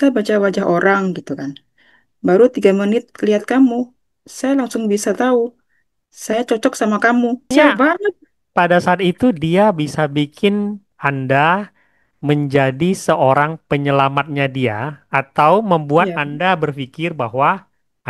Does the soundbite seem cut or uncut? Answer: cut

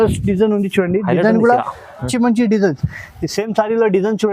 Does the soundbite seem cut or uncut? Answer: cut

